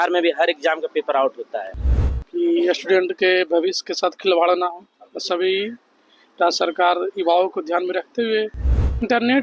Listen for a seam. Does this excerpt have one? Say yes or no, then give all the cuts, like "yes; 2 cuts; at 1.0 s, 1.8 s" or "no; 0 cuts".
yes; 1 cut; at 1.7 s